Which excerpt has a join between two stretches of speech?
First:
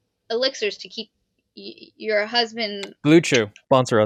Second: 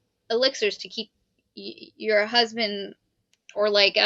second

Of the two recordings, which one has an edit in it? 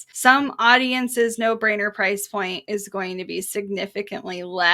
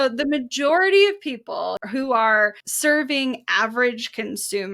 second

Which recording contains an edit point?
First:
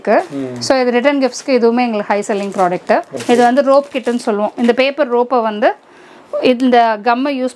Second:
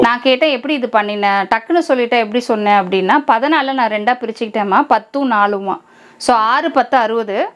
first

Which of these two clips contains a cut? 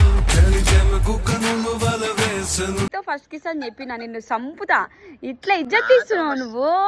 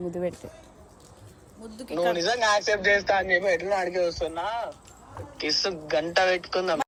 first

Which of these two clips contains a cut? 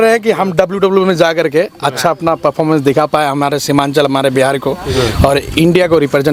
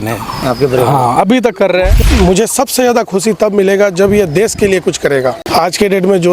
second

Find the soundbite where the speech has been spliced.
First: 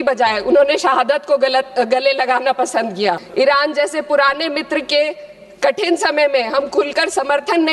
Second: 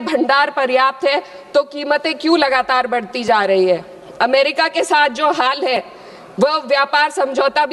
first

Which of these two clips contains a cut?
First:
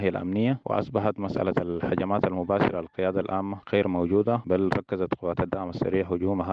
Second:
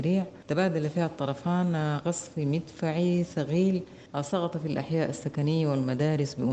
first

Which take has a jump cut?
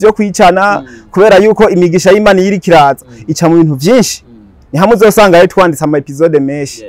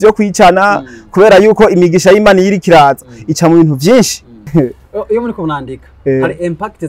second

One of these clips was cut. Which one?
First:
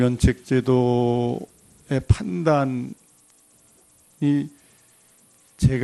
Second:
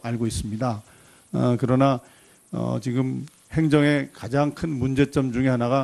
first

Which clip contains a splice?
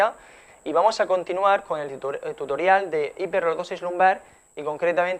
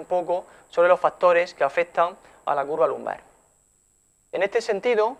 second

